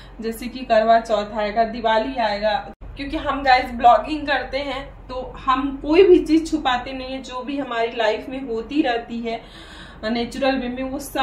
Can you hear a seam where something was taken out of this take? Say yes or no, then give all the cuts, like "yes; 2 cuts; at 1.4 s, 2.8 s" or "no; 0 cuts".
yes; 1 cut; at 2.7 s